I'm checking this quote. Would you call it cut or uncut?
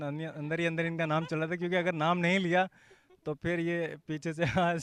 uncut